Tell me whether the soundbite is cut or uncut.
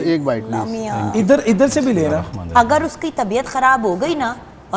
uncut